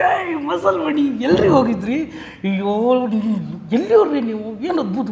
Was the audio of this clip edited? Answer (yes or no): no